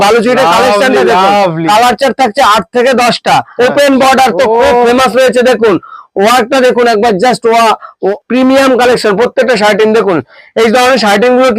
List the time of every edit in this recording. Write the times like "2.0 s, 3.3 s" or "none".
3.5 s, 7.9 s